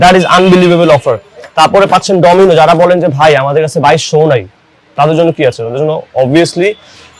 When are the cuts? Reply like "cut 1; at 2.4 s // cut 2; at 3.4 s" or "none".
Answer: none